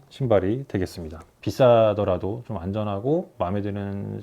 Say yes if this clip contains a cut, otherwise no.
yes